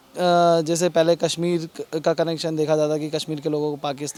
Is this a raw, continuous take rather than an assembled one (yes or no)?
yes